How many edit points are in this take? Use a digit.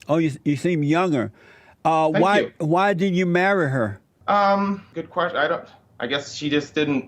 3